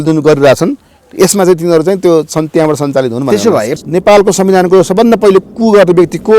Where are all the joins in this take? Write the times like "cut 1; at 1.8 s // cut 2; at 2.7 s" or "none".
cut 1; at 3.7 s